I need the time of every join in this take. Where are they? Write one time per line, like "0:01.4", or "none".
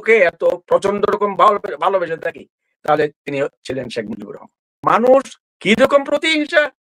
0:04.8